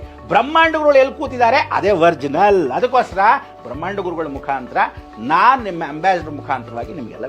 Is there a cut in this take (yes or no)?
no